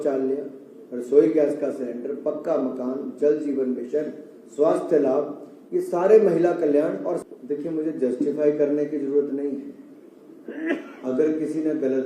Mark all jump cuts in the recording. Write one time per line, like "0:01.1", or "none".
0:07.2